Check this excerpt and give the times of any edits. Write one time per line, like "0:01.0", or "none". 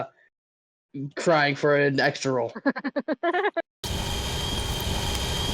0:03.8